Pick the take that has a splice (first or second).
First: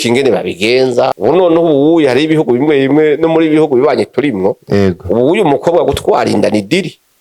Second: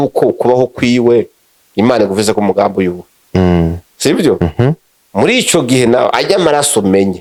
first